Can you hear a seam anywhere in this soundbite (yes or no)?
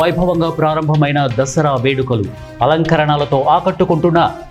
no